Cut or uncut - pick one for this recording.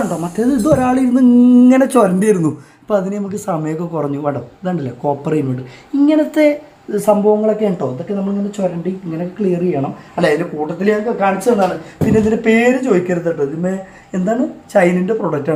uncut